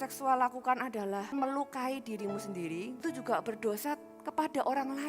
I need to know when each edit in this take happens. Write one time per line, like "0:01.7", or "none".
0:01.3
0:03.0